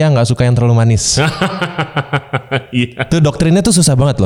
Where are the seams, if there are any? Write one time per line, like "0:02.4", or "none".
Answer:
none